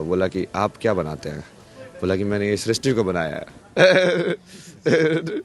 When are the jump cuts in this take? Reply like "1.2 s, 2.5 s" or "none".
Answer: none